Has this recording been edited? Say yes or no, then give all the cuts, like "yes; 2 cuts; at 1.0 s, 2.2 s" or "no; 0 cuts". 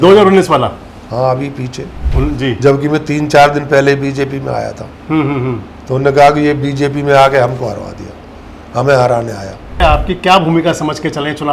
yes; 1 cut; at 9.8 s